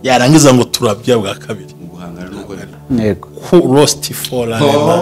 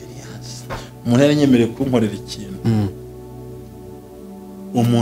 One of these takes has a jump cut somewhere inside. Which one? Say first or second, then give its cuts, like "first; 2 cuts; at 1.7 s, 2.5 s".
first; 1 cut; at 2.8 s